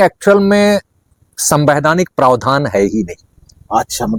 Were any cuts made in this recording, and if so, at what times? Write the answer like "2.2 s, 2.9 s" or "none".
none

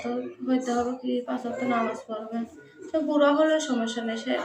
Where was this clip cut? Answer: none

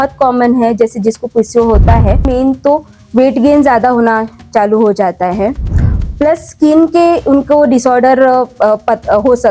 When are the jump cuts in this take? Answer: 2.3 s

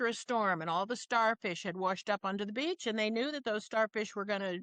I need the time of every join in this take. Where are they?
none

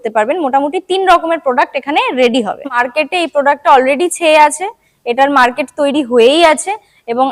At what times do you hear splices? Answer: 2.8 s

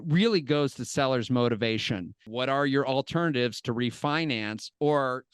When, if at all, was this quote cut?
2.2 s

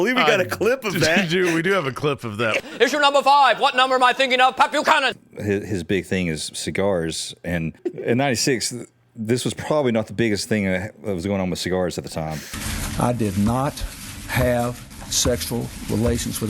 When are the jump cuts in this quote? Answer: 5.2 s, 7.8 s

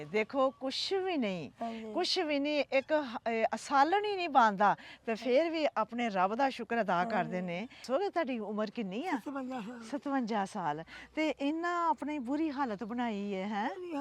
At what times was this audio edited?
7.7 s

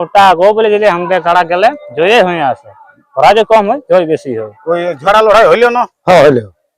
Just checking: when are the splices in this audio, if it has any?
4.9 s

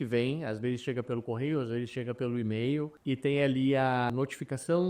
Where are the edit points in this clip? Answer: 3.0 s, 4.1 s

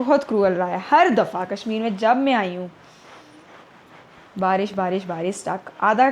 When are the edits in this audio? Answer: none

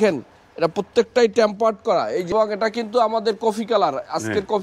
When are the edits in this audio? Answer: 2.3 s

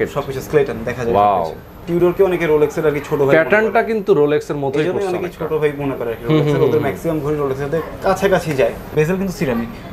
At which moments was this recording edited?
1.8 s, 8.9 s

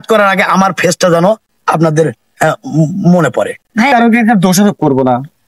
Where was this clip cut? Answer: 3.9 s

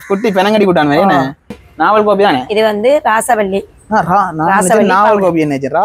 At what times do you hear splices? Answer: 1.6 s

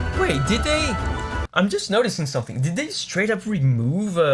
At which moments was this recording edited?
none

